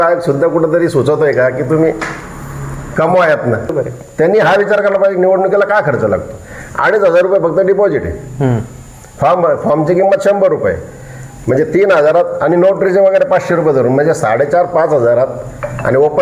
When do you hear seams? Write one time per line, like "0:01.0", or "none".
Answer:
0:03.7